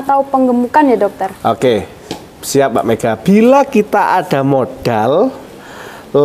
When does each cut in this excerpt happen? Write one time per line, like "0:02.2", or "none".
none